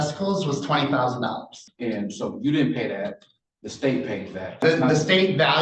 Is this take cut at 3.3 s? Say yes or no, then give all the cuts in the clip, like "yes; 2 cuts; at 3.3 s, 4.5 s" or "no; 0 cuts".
no; 2 cuts; at 1.6 s, 4.6 s